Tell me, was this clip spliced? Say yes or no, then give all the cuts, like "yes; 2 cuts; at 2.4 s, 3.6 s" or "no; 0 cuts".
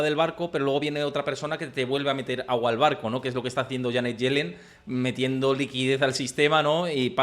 no; 0 cuts